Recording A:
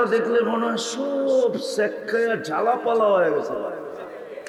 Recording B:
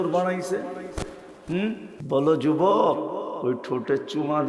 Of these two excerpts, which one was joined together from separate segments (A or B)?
B